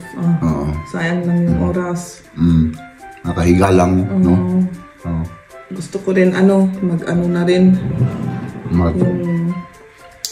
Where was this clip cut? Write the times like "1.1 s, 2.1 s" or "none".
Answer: none